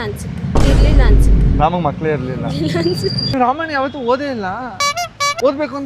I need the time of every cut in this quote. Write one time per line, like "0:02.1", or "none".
0:03.3